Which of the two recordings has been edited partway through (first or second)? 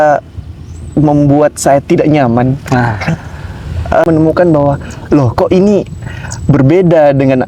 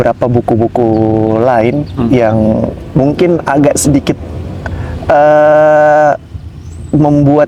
first